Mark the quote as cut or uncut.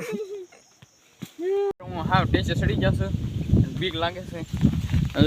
cut